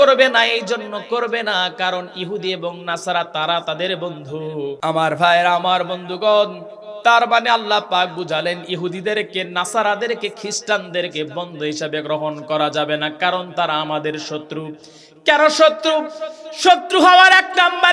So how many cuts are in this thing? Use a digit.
1